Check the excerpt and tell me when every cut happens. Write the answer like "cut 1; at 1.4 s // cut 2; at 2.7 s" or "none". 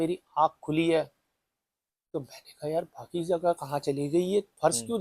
none

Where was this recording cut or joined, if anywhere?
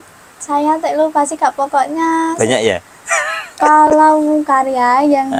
none

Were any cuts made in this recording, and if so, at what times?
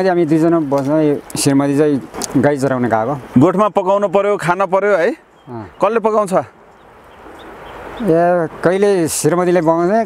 cut 1; at 1.3 s // cut 2; at 2.1 s // cut 3; at 3.2 s

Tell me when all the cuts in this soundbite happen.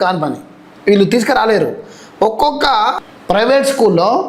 cut 1; at 3.1 s

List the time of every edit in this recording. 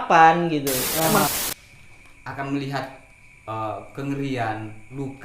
cut 1; at 1.3 s

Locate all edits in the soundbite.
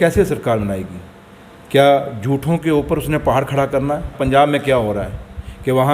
cut 1; at 4.2 s

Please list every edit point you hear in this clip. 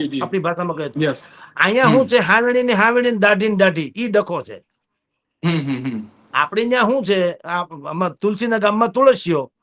none

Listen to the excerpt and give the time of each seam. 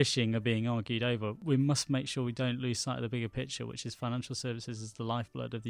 cut 1; at 1.4 s

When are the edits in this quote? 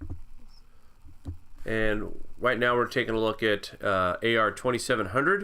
cut 1; at 2.9 s

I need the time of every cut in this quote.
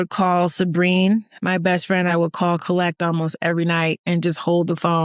cut 1; at 2.1 s

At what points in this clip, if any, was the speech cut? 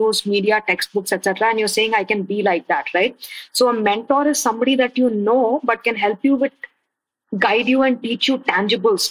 none

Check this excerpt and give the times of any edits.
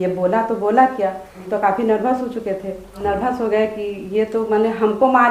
cut 1; at 1.3 s // cut 2; at 3.0 s

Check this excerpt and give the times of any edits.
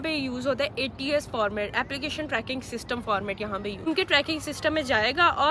cut 1; at 3.8 s

